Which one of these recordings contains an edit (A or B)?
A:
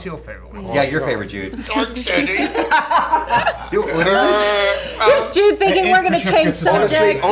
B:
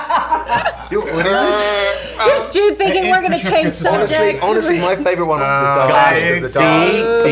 B